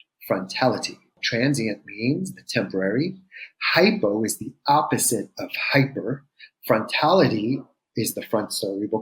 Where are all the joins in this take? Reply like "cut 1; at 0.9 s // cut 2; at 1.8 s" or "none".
cut 1; at 1.2 s